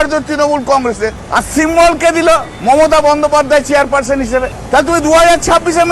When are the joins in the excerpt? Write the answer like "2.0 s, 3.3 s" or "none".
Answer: 1.2 s, 2.5 s, 4.6 s